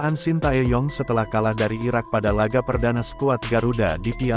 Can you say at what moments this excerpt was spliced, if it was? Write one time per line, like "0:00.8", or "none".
none